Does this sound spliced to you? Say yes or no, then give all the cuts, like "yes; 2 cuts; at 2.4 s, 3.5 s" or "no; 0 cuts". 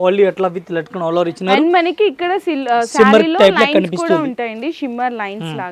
no; 0 cuts